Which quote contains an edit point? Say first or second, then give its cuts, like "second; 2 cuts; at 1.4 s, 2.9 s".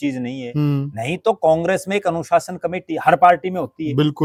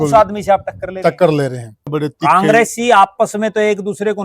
second; 1 cut; at 1.9 s